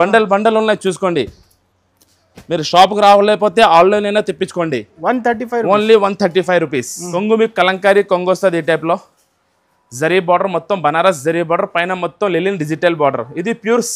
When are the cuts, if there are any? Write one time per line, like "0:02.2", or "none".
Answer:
0:07.0